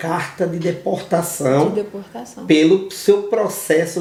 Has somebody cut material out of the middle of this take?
no; 0 cuts

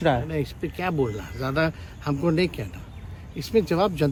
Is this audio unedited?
yes; 0 cuts

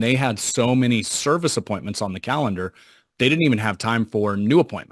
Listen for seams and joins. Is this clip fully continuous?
yes; 0 cuts

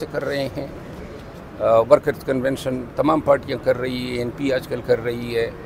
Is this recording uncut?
yes; 0 cuts

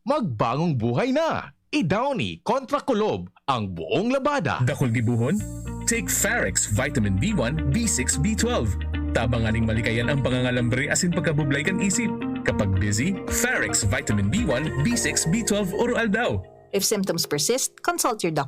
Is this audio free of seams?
no; 1 cut; at 4.5 s

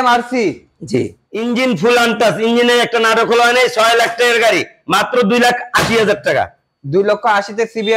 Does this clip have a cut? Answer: yes; 1 cut; at 1.2 s

